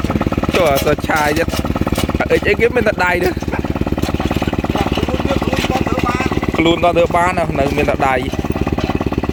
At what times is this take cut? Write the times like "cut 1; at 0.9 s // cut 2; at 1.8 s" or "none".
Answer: none